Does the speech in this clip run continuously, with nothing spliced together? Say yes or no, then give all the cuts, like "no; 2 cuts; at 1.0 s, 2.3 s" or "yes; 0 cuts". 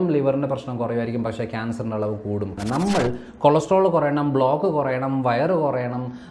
no; 1 cut; at 2.5 s